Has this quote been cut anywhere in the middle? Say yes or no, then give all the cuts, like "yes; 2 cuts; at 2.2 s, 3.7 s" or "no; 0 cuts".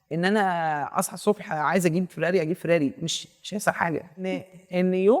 yes; 1 cut; at 4.3 s